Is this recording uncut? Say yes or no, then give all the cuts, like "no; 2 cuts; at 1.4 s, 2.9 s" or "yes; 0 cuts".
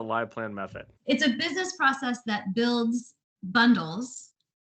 yes; 0 cuts